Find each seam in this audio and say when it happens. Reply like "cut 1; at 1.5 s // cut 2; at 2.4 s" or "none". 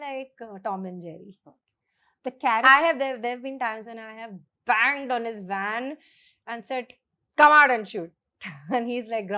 none